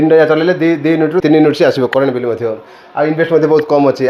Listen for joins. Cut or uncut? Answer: uncut